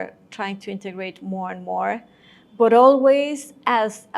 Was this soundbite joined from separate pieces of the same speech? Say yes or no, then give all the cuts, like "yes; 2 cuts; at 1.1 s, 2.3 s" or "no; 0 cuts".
no; 0 cuts